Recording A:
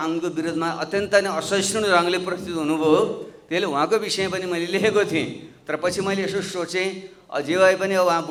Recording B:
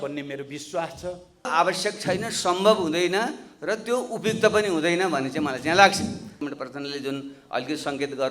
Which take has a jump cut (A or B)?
B